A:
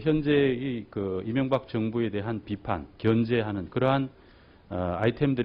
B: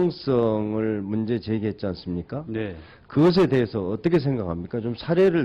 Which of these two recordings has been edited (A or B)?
A